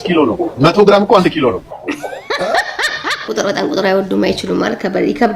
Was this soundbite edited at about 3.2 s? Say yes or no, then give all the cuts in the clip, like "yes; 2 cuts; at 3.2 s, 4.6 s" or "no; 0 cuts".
yes; 1 cut; at 3.2 s